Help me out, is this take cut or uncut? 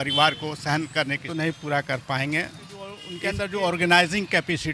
cut